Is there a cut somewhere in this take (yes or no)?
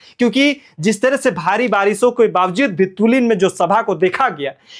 no